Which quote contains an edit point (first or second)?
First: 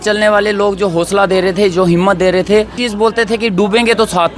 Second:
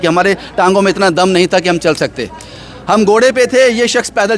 first